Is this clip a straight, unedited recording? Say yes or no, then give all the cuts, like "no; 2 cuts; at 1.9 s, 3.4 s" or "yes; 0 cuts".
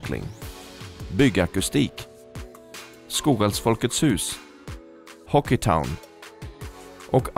yes; 0 cuts